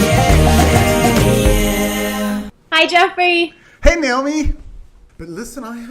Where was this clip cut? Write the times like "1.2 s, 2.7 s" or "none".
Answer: 2.3 s, 4.2 s

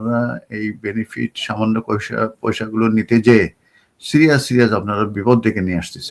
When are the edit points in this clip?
none

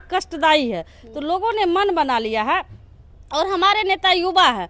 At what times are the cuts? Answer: none

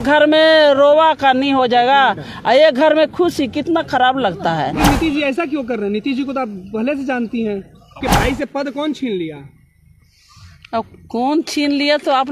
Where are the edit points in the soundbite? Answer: 4.7 s, 8.0 s

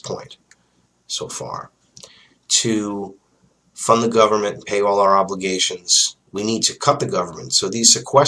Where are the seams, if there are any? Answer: 5.0 s

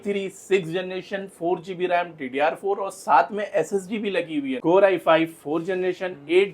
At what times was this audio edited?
4.6 s

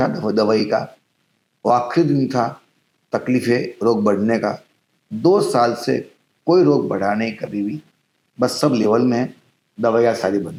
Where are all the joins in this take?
none

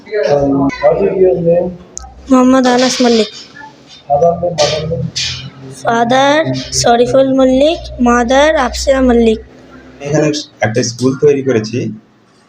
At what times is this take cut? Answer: 10.0 s

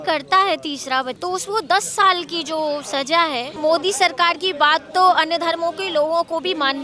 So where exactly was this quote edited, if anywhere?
1.1 s, 3.6 s

